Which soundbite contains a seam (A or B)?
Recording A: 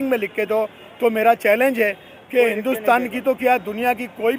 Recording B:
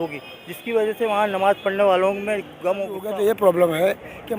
B